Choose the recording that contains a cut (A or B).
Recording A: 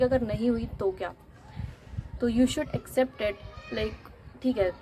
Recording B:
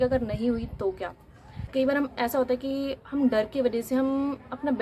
B